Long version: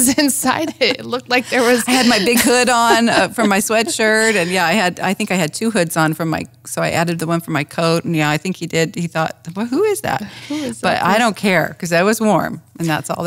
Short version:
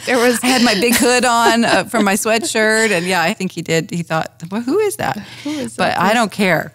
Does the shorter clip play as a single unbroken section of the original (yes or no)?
no